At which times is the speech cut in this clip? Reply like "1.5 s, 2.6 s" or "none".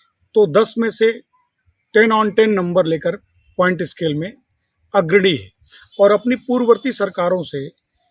none